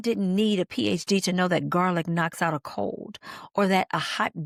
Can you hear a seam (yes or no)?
no